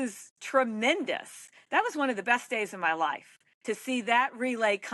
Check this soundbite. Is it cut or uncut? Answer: uncut